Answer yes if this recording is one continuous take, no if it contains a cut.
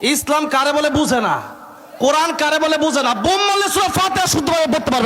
yes